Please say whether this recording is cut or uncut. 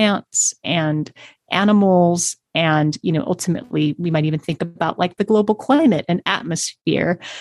uncut